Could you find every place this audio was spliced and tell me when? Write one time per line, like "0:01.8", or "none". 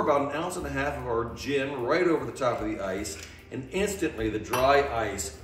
none